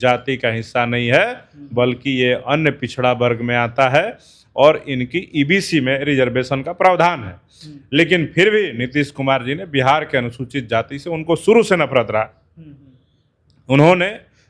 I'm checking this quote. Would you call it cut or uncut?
uncut